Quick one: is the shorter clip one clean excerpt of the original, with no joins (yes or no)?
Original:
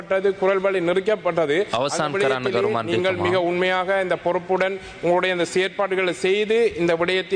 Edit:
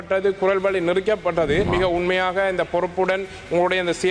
no